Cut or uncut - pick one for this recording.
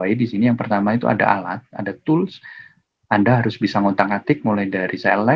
uncut